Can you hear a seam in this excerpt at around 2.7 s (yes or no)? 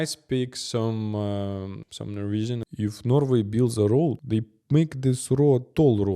yes